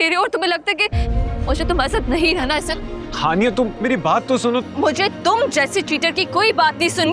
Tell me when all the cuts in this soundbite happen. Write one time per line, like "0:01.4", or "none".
0:04.6